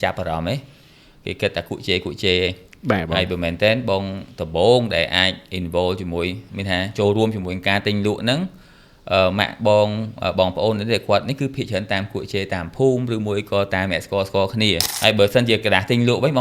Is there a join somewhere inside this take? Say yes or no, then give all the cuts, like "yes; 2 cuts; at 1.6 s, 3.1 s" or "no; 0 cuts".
yes; 1 cut; at 14.9 s